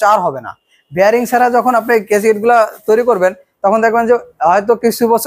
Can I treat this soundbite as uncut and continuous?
yes; 0 cuts

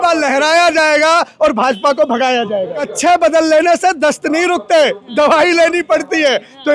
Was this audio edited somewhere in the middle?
yes; 1 cut; at 2.8 s

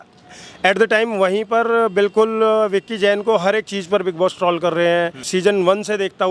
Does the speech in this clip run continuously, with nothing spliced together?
no; 1 cut; at 5.3 s

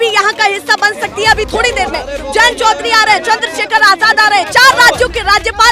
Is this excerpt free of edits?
yes; 0 cuts

